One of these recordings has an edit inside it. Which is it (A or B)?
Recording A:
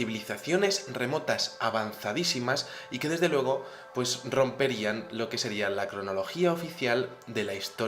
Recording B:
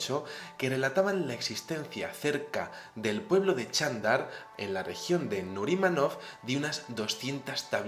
A